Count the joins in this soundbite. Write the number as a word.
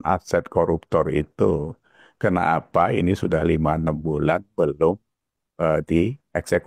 zero